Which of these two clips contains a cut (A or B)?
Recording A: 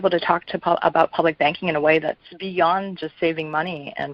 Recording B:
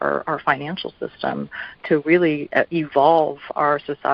A